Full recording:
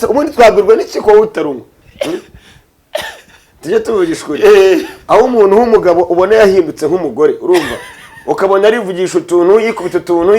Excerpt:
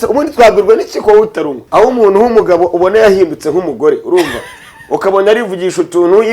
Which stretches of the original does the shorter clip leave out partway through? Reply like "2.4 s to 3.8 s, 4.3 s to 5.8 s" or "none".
1.6 s to 5.0 s